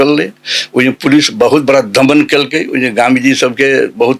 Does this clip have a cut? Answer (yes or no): no